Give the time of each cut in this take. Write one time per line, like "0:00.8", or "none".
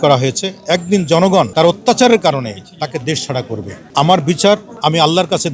0:01.5
0:03.8
0:04.7